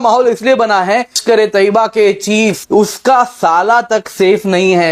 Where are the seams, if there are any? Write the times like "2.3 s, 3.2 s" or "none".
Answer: 1.2 s, 2.6 s